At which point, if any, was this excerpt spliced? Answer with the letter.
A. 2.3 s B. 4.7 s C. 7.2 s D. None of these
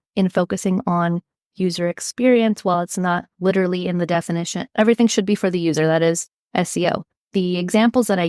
C